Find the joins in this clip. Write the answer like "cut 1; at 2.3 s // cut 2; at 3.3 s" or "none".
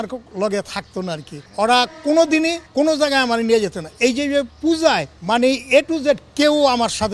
cut 1; at 1.3 s // cut 2; at 2.6 s // cut 3; at 4.5 s // cut 4; at 5.1 s

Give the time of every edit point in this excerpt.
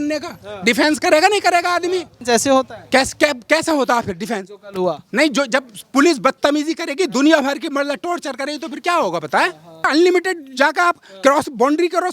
cut 1; at 2.1 s // cut 2; at 9.9 s

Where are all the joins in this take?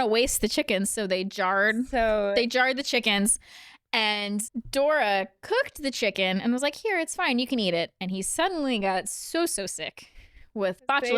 cut 1; at 4.6 s

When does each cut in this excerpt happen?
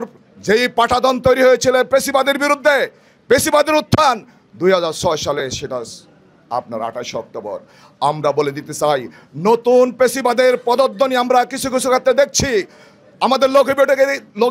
none

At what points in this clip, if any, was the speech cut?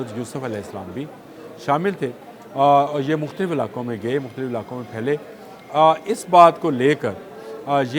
none

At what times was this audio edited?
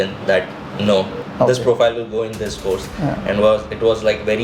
cut 1; at 1.2 s

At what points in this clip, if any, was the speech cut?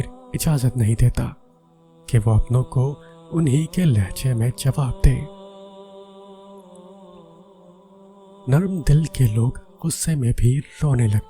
cut 1; at 5.8 s // cut 2; at 8.5 s

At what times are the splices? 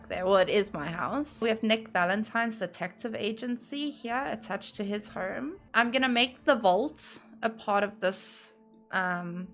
cut 1; at 1.4 s // cut 2; at 5.6 s

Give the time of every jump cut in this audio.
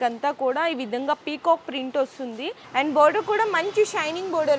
cut 1; at 2.6 s

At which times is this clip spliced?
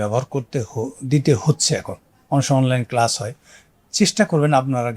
none

